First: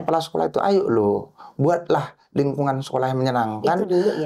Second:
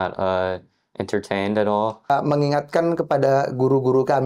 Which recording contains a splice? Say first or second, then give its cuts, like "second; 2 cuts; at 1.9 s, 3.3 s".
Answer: second; 1 cut; at 2.1 s